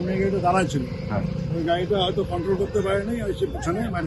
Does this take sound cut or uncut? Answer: uncut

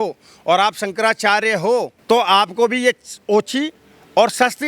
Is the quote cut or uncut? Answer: cut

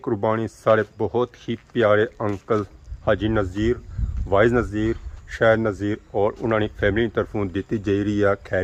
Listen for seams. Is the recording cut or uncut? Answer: uncut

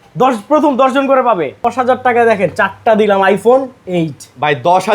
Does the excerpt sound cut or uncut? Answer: cut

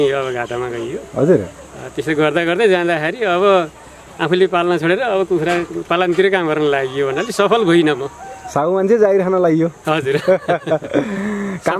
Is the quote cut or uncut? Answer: uncut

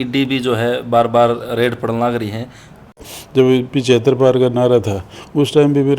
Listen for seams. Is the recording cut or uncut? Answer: cut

